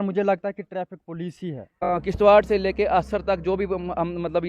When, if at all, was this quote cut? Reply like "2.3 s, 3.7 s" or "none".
1.9 s

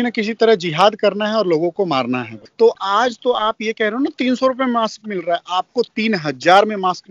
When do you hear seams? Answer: 2.4 s

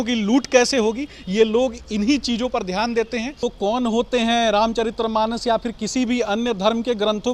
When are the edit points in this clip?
3.4 s

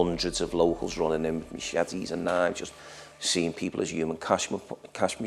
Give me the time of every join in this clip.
none

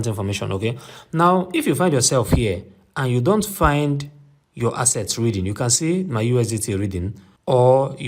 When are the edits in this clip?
none

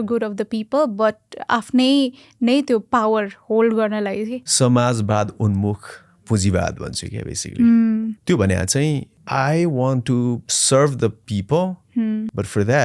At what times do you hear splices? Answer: 4.4 s, 8.2 s, 9.1 s, 10.5 s

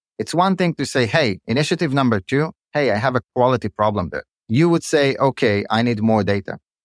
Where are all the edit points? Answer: 3.3 s, 4.4 s

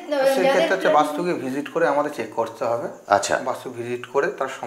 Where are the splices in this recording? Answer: none

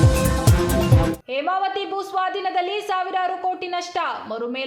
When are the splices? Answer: none

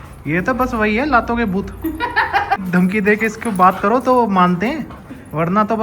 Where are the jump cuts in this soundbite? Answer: 2.6 s

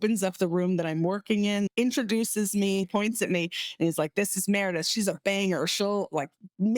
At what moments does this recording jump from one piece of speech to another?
1.7 s, 2.8 s

